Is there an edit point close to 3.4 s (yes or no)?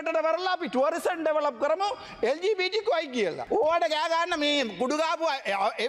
yes